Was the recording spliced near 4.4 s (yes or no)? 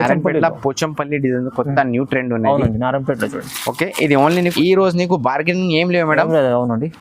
yes